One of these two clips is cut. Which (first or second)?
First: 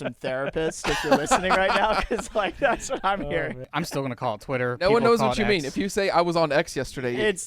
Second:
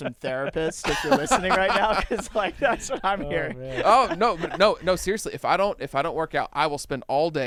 first